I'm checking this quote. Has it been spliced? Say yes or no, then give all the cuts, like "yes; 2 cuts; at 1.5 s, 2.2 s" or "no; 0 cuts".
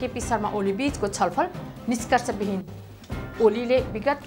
no; 0 cuts